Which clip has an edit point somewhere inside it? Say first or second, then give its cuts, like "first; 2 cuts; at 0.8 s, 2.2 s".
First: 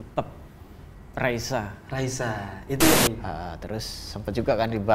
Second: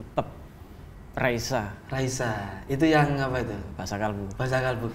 first; 1 cut; at 2.9 s